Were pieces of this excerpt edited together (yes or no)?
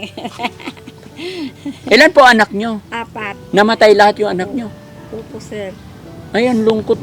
no